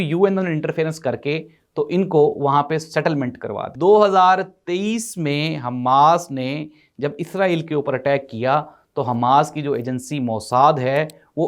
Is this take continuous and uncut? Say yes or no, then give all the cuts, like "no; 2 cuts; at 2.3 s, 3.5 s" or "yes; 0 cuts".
no; 1 cut; at 3.6 s